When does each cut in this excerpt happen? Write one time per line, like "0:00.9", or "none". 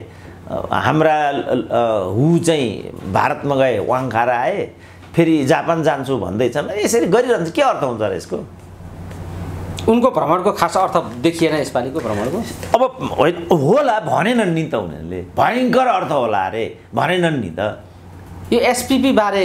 none